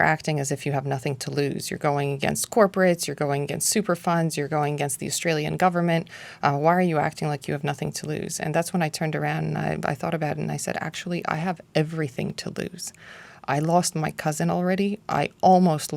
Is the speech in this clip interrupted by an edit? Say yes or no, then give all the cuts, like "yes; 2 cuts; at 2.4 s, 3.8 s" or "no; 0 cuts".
no; 0 cuts